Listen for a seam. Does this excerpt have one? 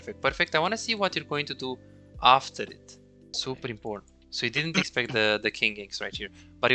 yes; 1 cut; at 3.4 s

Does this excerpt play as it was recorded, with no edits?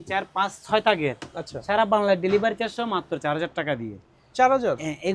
yes; 0 cuts

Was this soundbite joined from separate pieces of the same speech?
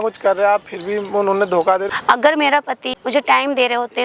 yes; 2 cuts; at 1.9 s, 2.9 s

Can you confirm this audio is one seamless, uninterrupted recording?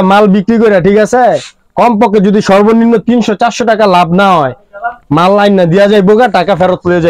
yes; 0 cuts

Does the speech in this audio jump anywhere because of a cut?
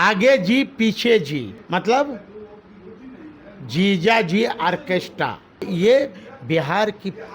yes; 2 cuts; at 1.6 s, 5.7 s

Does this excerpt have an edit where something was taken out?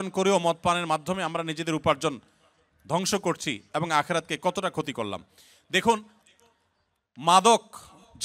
no; 0 cuts

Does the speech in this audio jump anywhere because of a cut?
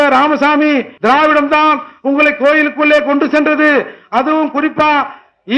yes; 1 cut; at 0.9 s

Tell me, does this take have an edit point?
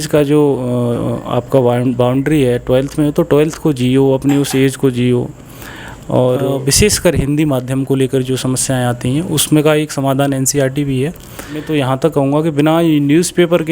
yes; 2 cuts; at 6.5 s, 11.7 s

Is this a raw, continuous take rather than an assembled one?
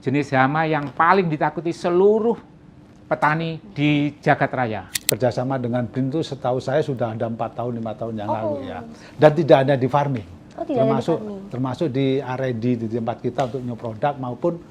no; 1 cut; at 4.9 s

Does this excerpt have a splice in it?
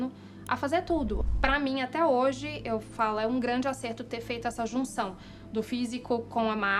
yes; 1 cut; at 1.2 s

